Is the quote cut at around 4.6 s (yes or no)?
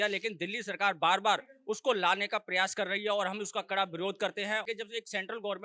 yes